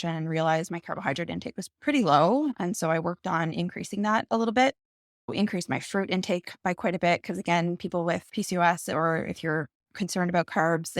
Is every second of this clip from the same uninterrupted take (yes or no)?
no